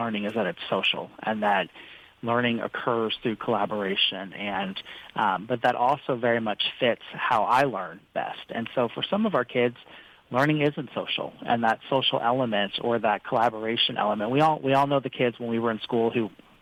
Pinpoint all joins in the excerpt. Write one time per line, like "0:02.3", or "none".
none